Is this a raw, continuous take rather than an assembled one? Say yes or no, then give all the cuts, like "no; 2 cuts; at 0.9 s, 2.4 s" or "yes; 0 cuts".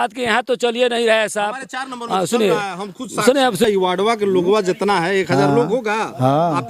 no; 1 cut; at 3.7 s